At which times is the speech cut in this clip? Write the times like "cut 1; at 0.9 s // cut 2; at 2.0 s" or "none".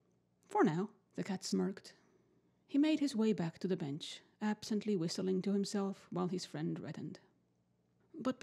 cut 1; at 1.6 s